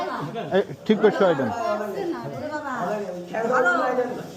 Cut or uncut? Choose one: uncut